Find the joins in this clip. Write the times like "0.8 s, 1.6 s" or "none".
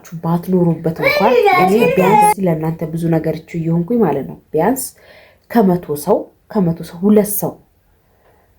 2.3 s